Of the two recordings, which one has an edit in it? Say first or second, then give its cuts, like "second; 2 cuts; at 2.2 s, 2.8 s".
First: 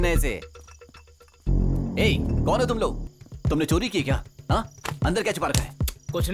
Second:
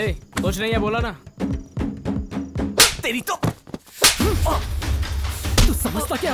first; 1 cut; at 3.1 s